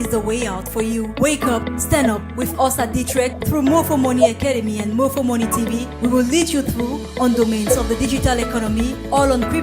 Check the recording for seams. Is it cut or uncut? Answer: cut